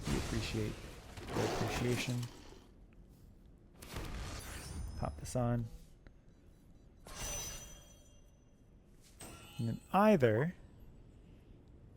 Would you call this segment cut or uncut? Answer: cut